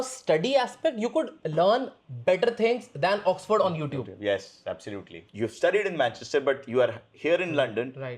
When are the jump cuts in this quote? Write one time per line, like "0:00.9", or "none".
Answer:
0:05.1